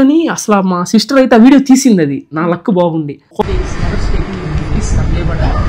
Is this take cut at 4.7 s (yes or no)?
no